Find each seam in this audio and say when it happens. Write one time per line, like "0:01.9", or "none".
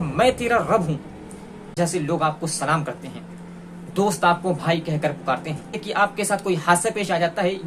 0:01.8
0:05.8